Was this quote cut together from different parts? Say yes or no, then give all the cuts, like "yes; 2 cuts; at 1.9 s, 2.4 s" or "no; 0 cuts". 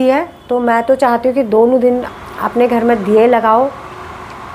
no; 0 cuts